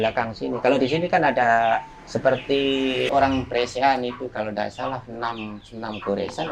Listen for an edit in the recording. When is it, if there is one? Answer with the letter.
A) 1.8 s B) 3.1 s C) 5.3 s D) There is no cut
B